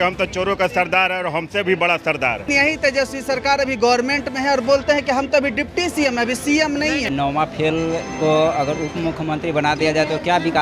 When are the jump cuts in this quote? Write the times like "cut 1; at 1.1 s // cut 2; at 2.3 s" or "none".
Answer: cut 1; at 2.4 s // cut 2; at 7.1 s